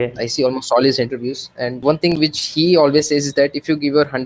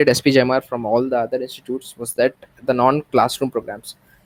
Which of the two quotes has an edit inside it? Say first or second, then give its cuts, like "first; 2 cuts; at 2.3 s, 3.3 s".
first; 1 cut; at 1.8 s